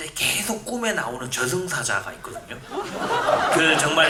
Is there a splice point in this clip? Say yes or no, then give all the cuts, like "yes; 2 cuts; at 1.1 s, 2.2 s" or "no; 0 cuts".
no; 0 cuts